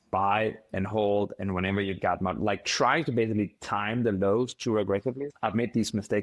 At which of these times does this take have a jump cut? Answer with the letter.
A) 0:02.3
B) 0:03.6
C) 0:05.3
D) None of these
C